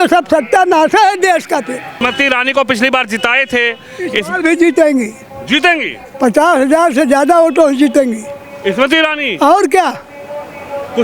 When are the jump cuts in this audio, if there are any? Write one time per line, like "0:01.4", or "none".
0:01.9